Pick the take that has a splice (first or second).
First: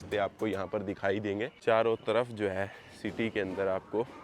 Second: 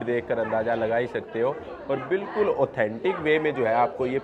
first